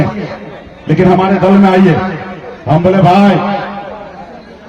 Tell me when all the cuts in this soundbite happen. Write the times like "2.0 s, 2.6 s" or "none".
none

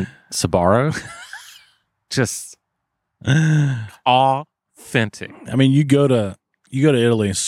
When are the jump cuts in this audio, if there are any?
none

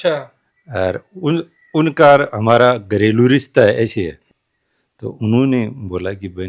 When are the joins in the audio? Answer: none

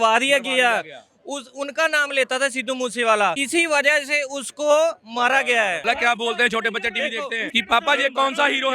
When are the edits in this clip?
3.4 s, 5.8 s, 7.5 s

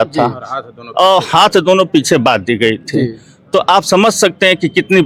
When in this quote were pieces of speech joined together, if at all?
none

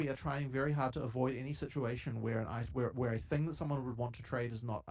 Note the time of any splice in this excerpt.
3.8 s

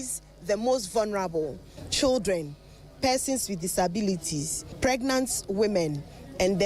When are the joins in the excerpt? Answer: 1.9 s, 4.7 s

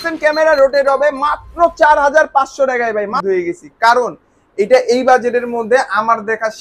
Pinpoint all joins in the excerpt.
3.2 s

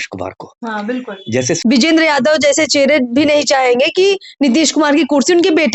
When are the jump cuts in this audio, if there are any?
1.5 s

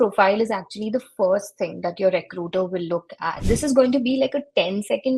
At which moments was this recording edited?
3.4 s

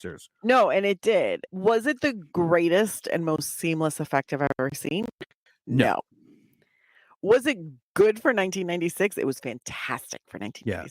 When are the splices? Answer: 1.4 s

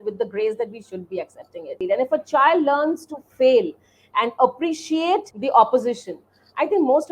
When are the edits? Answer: 1.7 s, 5.3 s

